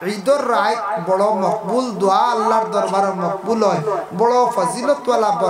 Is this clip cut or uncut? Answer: uncut